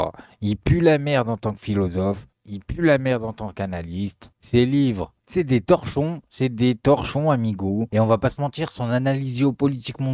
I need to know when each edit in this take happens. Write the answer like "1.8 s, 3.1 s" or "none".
none